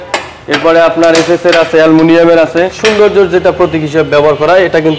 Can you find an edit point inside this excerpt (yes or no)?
yes